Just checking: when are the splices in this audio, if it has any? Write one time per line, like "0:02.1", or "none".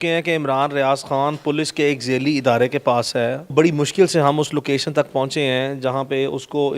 0:03.5